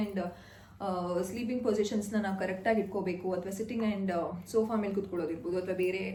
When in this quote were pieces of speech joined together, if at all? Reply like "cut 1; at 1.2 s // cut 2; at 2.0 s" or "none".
none